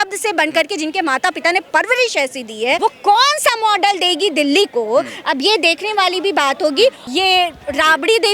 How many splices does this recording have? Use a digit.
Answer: 2